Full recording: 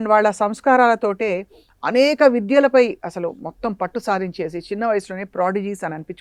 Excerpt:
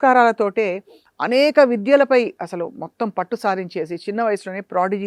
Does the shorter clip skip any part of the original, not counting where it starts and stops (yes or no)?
no